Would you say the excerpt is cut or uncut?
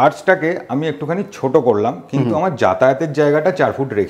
uncut